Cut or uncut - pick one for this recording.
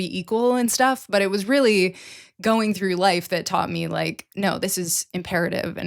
uncut